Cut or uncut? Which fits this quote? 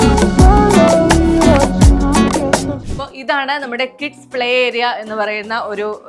cut